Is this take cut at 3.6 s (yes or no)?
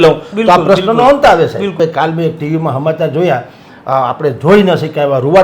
no